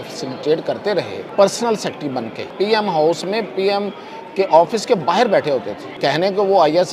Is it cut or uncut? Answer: cut